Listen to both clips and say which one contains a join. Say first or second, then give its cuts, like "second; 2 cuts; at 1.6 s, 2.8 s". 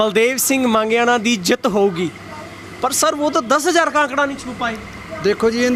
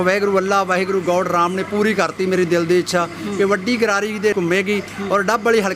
second; 1 cut; at 4.3 s